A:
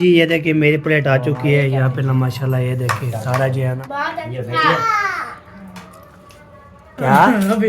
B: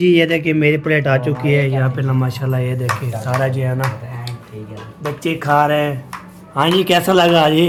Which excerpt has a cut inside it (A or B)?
A